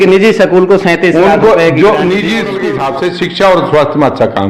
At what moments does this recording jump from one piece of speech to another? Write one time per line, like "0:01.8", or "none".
0:02.6